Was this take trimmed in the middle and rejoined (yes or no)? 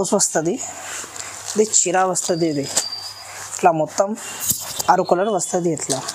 no